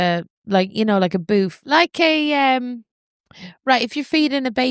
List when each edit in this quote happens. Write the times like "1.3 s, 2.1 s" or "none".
1.6 s